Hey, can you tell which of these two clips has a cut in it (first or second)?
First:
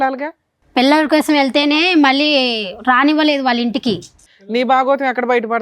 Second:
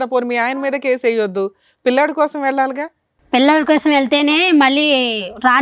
first